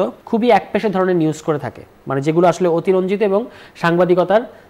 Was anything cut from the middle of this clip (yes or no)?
no